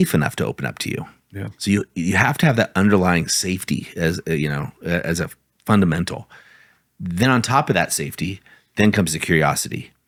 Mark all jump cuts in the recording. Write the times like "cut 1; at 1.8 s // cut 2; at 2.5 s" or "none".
none